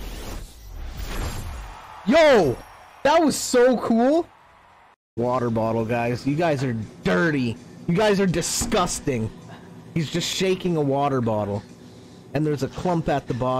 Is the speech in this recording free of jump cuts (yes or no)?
no